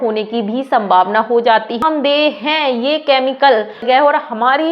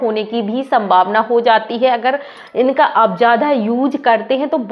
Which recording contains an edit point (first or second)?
first